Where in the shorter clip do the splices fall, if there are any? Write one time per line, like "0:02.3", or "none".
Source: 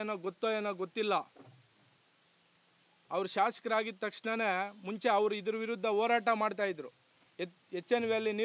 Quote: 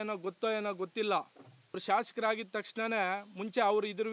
0:01.8